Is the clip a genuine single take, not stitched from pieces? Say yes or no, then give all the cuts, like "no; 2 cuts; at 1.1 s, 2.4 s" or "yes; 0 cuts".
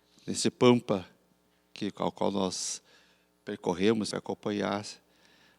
no; 1 cut; at 4.1 s